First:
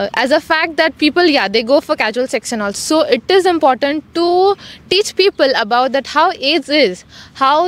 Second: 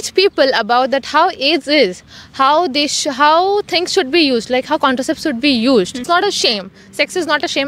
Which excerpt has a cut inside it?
second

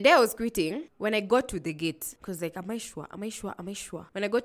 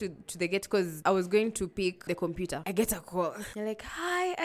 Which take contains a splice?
second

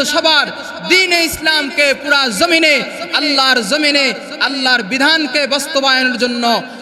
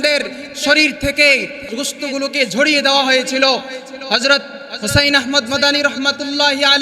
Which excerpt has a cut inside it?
second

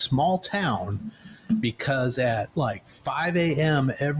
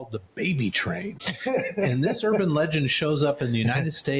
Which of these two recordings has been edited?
second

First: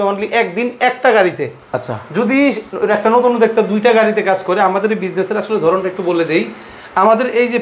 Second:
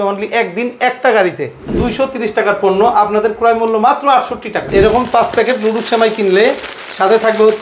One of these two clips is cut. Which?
second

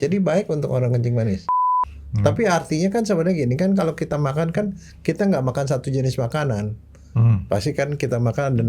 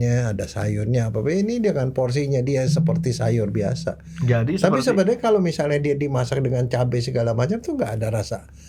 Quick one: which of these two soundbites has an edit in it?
first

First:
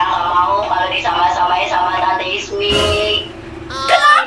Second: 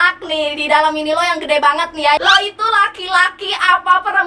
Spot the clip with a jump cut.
second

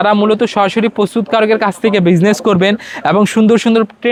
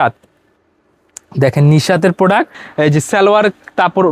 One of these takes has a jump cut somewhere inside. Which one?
second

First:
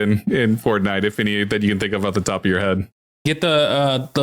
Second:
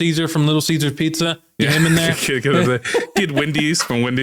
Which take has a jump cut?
first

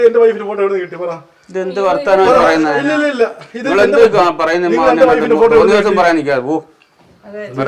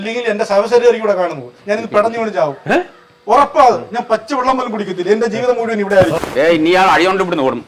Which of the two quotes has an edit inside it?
second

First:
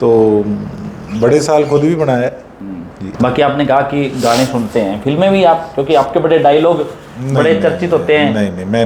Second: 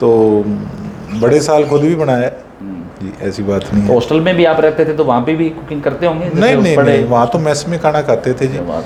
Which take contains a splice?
first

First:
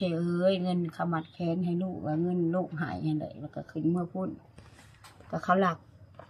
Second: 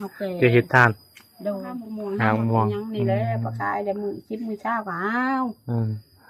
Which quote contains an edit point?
second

